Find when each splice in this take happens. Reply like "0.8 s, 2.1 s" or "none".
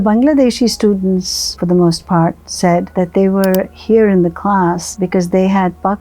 2.9 s, 4.9 s